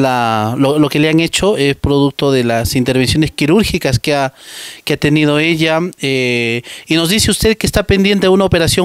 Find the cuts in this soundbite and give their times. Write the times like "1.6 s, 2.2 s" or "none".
none